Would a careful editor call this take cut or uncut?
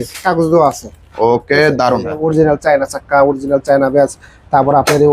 cut